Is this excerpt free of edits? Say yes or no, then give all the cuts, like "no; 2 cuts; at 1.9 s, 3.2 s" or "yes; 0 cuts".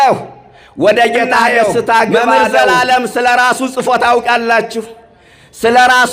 no; 1 cut; at 2.6 s